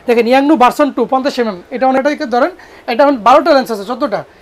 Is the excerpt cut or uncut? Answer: cut